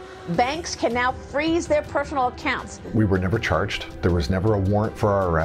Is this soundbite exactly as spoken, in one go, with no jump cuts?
no; 2 cuts; at 2.8 s, 3.8 s

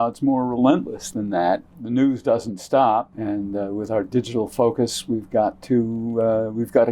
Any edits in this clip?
yes; 2 cuts; at 1.7 s, 3.1 s

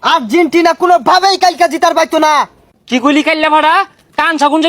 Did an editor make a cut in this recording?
yes; 1 cut; at 2.6 s

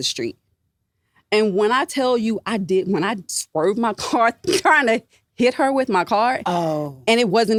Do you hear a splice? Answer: no; 0 cuts

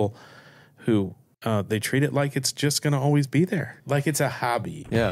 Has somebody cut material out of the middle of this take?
yes; 2 cuts; at 1.2 s, 3.7 s

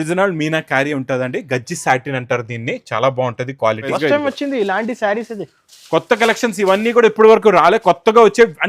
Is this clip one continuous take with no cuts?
no; 1 cut; at 3.9 s

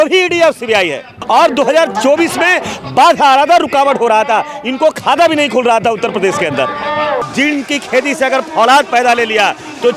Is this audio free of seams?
no; 2 cuts; at 1.1 s, 7.3 s

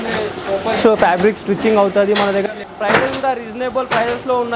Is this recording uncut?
no; 1 cut; at 2.6 s

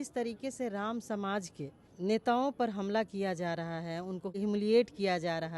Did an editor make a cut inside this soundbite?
yes; 2 cuts; at 1.8 s, 4.4 s

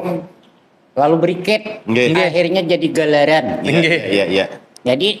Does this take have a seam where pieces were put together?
no; 0 cuts

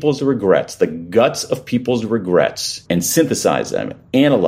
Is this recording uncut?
no; 1 cut; at 2.7 s

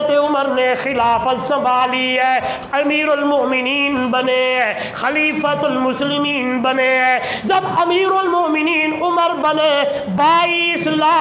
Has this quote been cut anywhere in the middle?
no; 0 cuts

